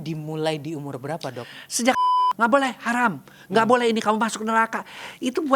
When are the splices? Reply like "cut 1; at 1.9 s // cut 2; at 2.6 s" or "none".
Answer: cut 1; at 2.0 s